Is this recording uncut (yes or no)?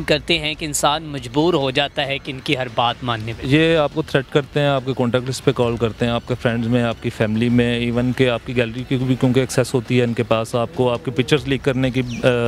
yes